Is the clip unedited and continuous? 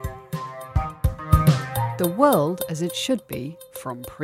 yes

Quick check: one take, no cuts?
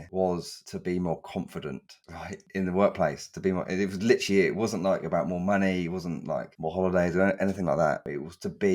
yes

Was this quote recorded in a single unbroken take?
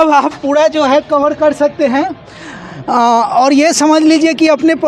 yes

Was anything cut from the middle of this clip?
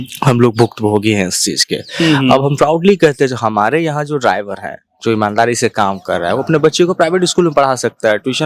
no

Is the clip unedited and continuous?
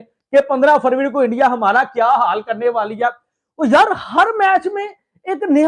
yes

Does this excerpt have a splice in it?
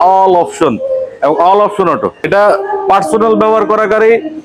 yes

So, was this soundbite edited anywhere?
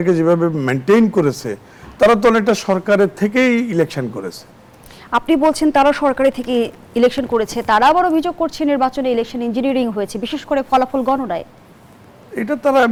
no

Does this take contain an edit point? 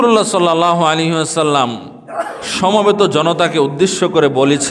no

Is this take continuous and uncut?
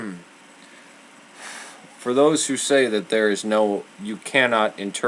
no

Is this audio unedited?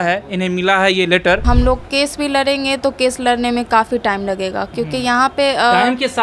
no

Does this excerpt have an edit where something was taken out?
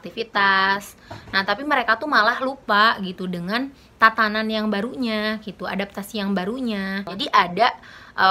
no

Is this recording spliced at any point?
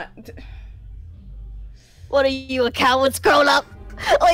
no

